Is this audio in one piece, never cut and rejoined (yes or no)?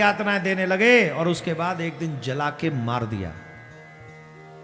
yes